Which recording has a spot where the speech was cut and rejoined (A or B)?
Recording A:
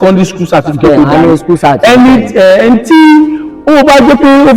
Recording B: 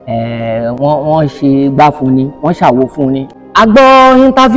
B